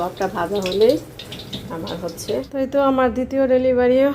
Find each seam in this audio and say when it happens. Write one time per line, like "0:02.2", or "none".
0:02.5